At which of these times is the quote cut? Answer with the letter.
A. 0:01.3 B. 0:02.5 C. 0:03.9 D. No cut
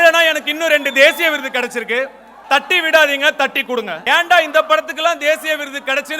C